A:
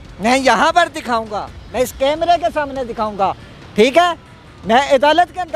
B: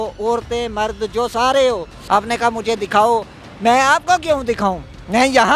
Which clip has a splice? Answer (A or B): B